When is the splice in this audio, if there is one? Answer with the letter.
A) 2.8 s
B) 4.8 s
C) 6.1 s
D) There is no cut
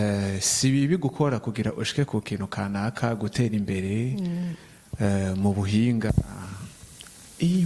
C